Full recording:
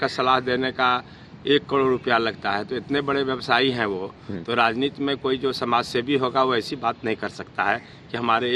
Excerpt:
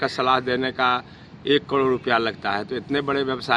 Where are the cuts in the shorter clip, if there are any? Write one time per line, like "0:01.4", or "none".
none